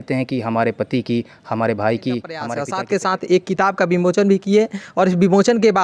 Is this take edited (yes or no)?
yes